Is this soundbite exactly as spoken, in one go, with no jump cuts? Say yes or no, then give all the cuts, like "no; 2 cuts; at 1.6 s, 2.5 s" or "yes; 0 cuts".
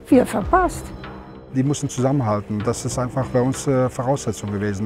no; 1 cut; at 1.3 s